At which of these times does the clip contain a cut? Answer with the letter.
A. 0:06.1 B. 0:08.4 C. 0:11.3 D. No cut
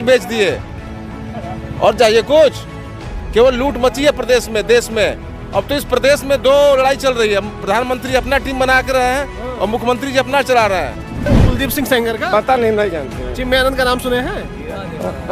C